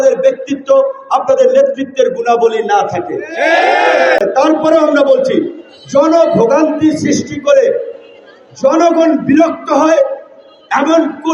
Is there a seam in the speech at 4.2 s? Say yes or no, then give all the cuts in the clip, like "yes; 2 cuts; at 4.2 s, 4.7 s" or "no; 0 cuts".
yes; 1 cut; at 4.2 s